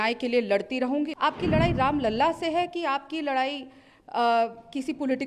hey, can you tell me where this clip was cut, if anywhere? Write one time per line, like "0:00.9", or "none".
0:01.1